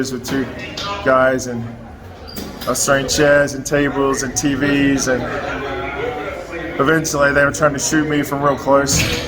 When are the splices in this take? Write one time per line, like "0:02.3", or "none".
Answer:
0:05.9